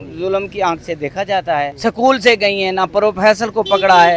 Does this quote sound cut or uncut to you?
cut